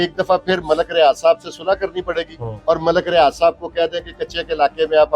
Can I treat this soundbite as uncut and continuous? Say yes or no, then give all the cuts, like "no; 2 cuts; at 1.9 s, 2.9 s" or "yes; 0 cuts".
no; 1 cut; at 2.4 s